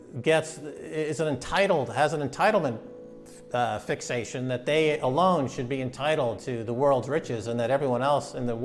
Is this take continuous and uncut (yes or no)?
yes